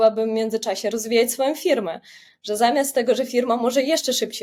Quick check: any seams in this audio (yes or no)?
no